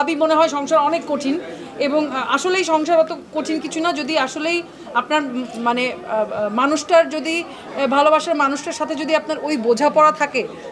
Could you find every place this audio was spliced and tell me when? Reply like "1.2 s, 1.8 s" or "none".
none